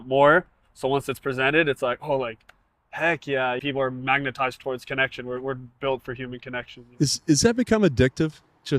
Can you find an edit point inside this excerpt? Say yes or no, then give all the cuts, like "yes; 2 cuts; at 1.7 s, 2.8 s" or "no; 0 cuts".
yes; 2 cuts; at 3.6 s, 6.8 s